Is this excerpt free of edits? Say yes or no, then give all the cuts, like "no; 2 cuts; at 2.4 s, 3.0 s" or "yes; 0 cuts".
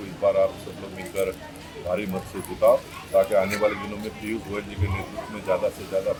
yes; 0 cuts